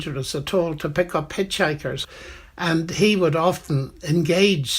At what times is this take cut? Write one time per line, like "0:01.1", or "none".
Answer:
0:02.0

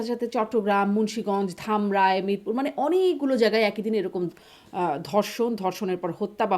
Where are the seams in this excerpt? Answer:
none

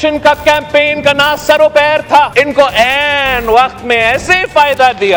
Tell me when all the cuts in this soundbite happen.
none

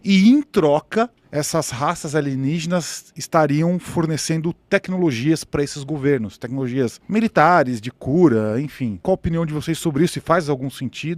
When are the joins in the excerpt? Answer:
0:07.0
0:09.0

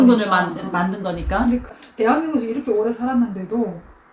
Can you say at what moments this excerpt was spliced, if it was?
0:01.6

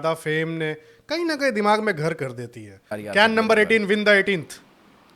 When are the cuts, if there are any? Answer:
0:02.9

